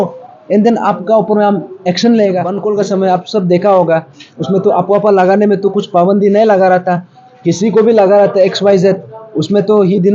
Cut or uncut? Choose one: cut